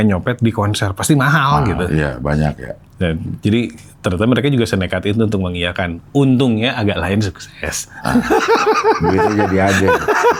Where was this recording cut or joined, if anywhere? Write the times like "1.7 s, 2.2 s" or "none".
none